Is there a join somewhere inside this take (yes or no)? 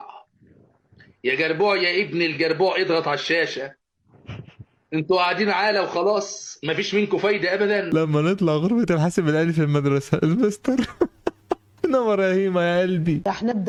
no